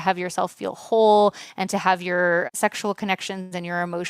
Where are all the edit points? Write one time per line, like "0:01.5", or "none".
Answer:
0:02.5